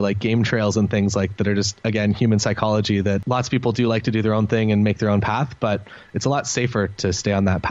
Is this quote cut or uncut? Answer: cut